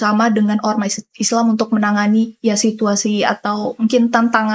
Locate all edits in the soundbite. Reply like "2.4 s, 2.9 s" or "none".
none